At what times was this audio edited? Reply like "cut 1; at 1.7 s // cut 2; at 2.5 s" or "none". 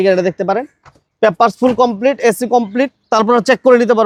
none